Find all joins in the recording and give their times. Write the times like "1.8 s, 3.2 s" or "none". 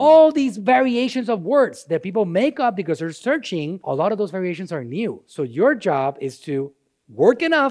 3.8 s